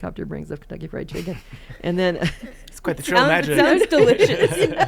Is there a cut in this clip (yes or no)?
no